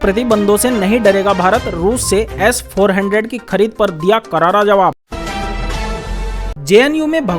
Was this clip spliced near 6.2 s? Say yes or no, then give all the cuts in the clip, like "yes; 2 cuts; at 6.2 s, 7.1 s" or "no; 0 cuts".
yes; 2 cuts; at 5.0 s, 6.2 s